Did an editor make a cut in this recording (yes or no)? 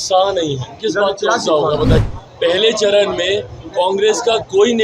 yes